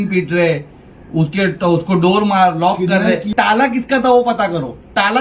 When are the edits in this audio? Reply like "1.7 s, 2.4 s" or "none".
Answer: 3.3 s

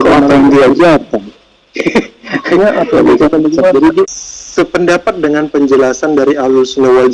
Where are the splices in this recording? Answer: 4.0 s

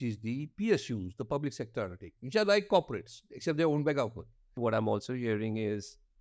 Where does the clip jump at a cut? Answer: 4.6 s

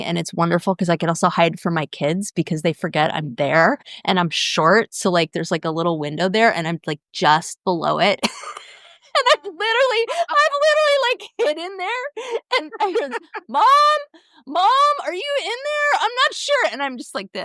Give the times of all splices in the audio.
none

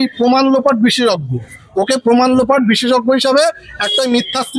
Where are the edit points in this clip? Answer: none

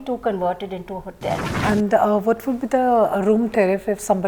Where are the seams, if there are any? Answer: 1.5 s

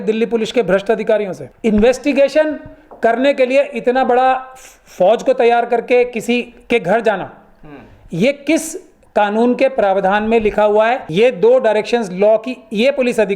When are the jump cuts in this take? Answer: 1.4 s, 11.0 s

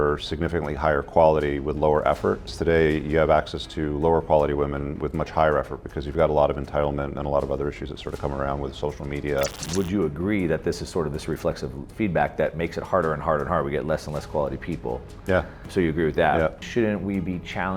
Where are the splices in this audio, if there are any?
2.5 s, 9.6 s, 15.6 s, 16.6 s

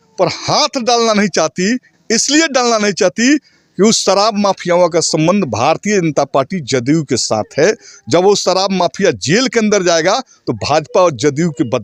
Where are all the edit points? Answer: none

